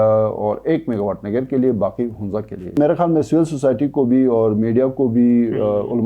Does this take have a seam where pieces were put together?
yes; 1 cut; at 2.8 s

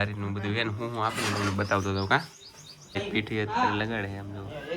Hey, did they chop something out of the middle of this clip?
yes; 1 cut; at 3.1 s

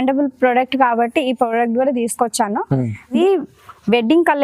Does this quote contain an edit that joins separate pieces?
yes; 1 cut; at 3.1 s

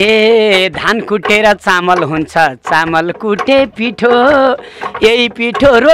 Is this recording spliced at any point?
no; 0 cuts

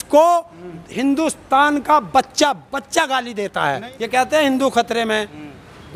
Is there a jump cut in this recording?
yes; 1 cut; at 3.9 s

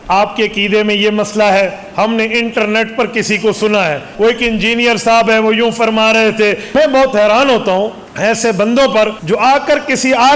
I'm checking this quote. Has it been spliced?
yes; 4 cuts; at 4.1 s, 6.6 s, 8.0 s, 9.2 s

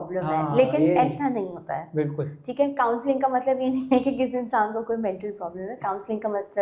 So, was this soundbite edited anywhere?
no; 0 cuts

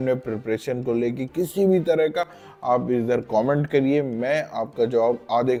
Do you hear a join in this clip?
no; 0 cuts

